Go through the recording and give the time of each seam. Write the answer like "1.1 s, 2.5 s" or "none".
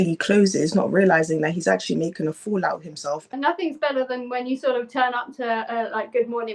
3.4 s